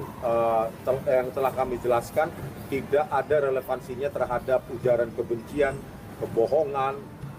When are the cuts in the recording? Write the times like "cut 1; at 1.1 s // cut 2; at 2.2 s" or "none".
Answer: none